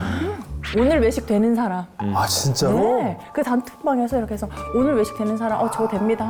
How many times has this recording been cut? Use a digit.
0